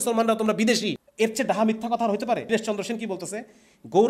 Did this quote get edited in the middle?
yes; 2 cuts; at 1.0 s, 2.4 s

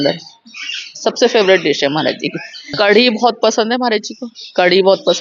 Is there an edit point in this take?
yes; 1 cut; at 2.7 s

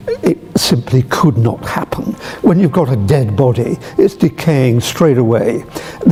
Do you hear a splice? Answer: no; 0 cuts

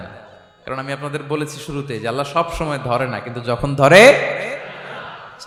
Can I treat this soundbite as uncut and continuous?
yes; 0 cuts

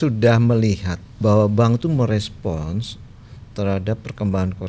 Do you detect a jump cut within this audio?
yes; 1 cut; at 1.0 s

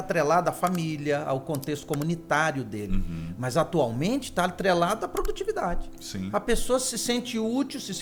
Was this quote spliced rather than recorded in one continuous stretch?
no; 0 cuts

